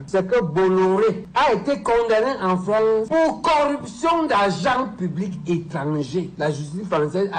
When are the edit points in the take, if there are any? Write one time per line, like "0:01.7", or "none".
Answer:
none